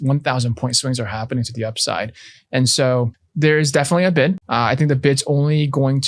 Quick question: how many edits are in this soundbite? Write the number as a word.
two